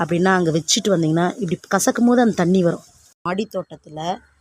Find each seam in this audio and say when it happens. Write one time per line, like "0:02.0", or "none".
0:03.2